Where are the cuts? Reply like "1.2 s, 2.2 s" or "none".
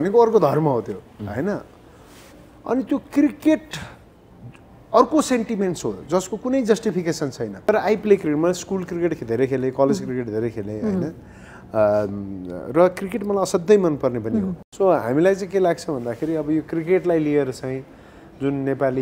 7.7 s, 14.6 s